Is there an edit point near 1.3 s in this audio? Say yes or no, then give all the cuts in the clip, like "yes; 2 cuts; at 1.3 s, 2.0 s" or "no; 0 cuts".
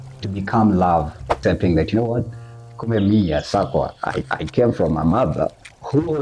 yes; 1 cut; at 1.3 s